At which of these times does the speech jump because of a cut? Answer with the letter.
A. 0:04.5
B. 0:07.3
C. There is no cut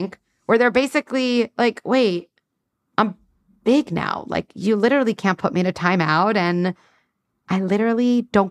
C